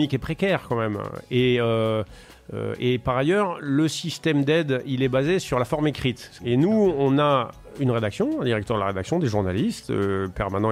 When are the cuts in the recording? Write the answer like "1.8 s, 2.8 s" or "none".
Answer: 6.3 s